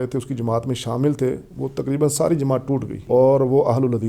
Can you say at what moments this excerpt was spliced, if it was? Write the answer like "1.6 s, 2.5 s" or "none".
2.9 s